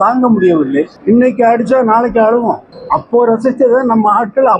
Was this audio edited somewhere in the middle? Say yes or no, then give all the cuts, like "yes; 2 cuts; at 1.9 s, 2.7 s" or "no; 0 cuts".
yes; 2 cuts; at 0.9 s, 2.7 s